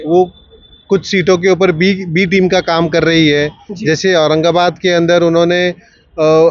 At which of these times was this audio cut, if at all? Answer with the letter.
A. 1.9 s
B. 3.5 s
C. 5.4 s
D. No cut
D